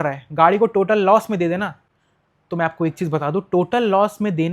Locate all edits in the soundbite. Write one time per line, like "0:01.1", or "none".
none